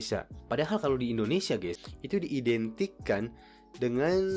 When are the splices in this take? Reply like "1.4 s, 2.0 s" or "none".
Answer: 1.8 s